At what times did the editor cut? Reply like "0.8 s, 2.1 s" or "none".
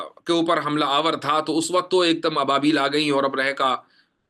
none